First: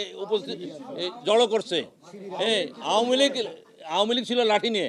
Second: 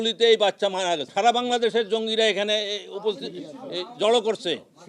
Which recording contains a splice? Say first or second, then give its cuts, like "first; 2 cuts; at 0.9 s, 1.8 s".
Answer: second; 1 cut; at 1.1 s